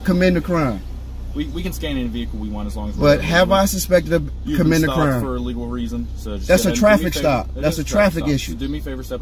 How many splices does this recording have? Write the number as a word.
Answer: two